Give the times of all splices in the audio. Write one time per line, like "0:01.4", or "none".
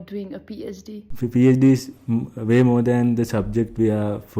0:01.1